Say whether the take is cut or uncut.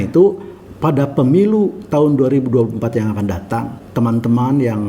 cut